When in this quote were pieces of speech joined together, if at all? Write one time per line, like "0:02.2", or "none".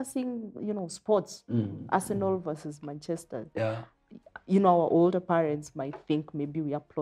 none